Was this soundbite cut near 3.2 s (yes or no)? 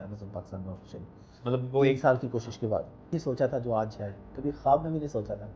yes